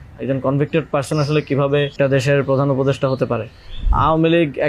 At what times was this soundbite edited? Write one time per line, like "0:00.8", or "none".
0:01.9
0:03.9